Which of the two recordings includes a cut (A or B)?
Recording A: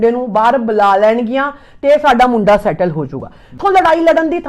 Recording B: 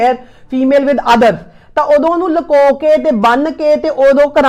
A